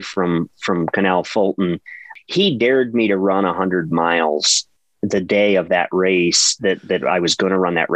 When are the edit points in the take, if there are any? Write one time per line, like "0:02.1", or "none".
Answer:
0:02.1